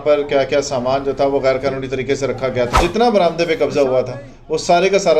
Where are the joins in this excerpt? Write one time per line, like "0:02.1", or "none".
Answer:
0:02.8